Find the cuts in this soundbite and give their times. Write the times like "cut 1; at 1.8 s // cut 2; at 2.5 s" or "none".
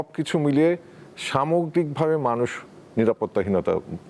none